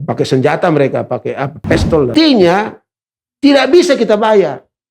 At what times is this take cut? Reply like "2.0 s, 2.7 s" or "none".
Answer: 2.1 s